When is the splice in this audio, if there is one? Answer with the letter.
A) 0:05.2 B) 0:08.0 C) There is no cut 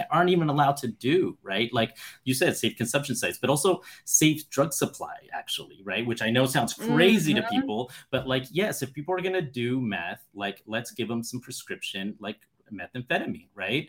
C